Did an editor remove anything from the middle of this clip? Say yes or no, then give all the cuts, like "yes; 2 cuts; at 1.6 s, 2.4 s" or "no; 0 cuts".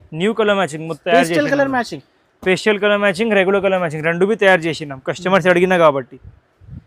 yes; 1 cut; at 0.9 s